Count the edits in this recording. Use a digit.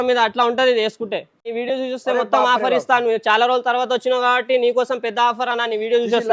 1